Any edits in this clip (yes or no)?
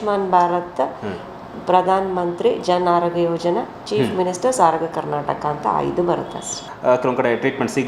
yes